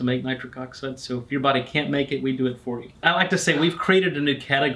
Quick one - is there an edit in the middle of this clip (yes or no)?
yes